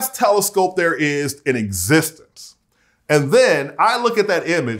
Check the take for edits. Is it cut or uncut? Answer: uncut